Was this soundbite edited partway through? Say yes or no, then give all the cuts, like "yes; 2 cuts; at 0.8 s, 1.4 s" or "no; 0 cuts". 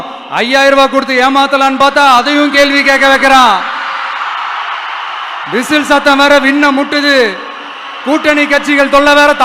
no; 0 cuts